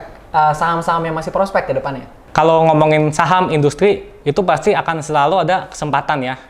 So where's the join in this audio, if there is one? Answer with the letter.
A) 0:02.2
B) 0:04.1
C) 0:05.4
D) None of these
A